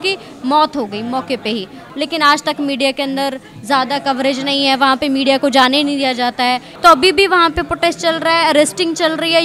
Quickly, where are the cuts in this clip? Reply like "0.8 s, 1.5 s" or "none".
1.8 s, 6.7 s